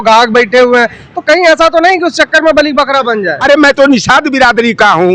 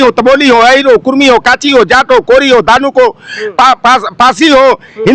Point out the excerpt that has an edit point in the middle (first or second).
first